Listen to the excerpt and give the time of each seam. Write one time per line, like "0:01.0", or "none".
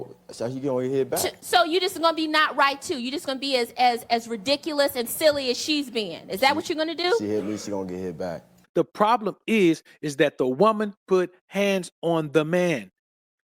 0:08.5